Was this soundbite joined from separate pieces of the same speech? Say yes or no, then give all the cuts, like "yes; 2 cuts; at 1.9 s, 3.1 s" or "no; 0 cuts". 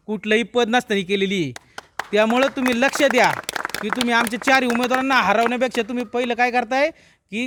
no; 0 cuts